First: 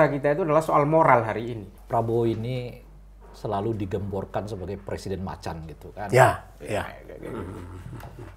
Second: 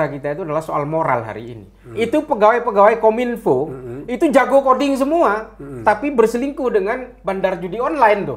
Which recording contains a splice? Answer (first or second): first